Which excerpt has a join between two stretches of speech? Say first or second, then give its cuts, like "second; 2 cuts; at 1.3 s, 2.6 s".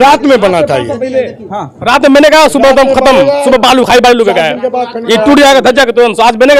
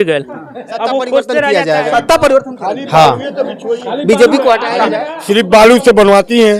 second; 1 cut; at 1.5 s